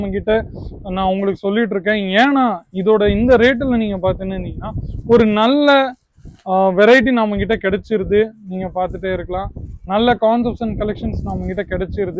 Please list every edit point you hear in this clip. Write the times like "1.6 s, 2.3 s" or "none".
none